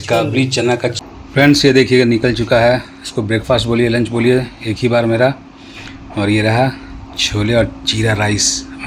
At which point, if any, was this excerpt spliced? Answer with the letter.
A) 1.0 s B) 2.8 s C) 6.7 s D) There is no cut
A